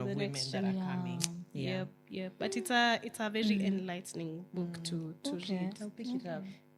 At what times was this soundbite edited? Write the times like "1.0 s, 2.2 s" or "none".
none